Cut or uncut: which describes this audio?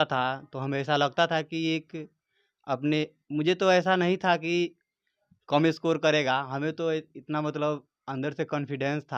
uncut